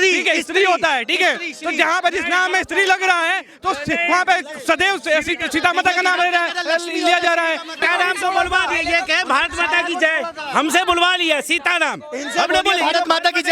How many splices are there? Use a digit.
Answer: 1